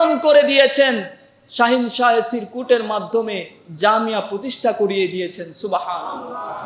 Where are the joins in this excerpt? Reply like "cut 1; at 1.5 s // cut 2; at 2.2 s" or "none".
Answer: none